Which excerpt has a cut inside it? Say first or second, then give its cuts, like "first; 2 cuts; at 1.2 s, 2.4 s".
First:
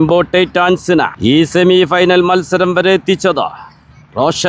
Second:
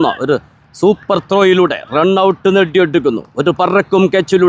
first; 1 cut; at 1.1 s